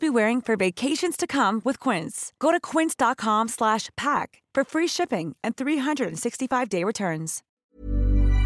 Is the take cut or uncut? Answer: cut